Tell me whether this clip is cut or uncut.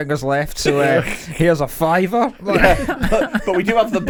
uncut